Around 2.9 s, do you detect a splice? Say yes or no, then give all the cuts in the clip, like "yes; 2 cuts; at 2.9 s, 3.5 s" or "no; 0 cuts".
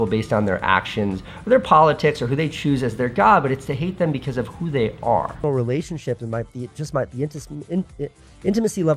no; 1 cut; at 5.3 s